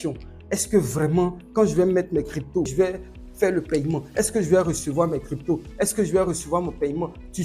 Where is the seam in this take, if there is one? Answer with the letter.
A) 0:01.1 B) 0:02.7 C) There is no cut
B